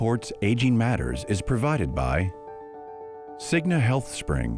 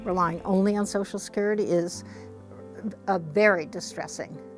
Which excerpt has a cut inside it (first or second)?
first